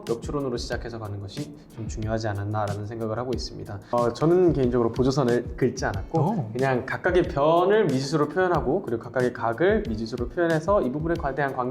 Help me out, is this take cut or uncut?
cut